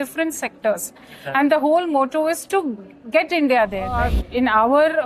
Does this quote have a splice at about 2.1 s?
no; 1 cut; at 3.9 s

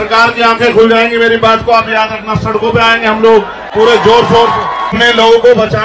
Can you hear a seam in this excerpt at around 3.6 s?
yes; 2 cuts; at 3.6 s, 5.0 s

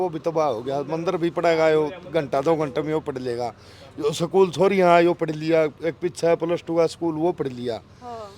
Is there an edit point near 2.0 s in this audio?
no; 0 cuts

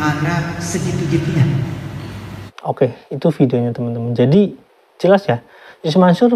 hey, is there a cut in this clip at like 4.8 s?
no; 1 cut; at 2.5 s

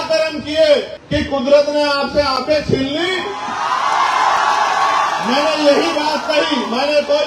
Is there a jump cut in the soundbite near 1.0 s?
yes; 1 cut; at 1.0 s

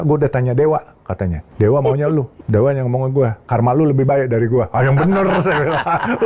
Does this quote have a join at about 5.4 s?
no; 2 cuts; at 1.4 s, 2.4 s

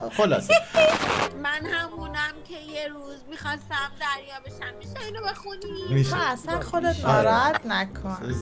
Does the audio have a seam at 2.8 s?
no; 1 cut; at 1.1 s

